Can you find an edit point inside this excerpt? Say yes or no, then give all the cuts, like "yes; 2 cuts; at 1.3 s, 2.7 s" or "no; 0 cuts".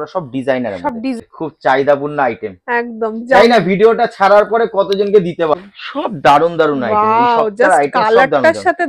yes; 2 cuts; at 1.2 s, 5.5 s